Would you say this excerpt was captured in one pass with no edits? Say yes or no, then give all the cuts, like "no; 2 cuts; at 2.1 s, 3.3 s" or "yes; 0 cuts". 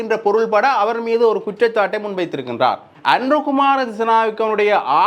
no; 1 cut; at 2.9 s